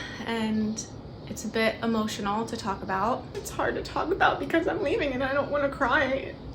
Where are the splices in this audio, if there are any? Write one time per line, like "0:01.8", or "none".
0:03.3